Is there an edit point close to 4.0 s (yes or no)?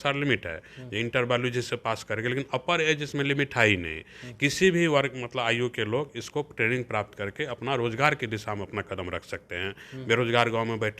no